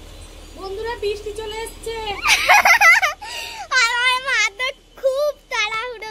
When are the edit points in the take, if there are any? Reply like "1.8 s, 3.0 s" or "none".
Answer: none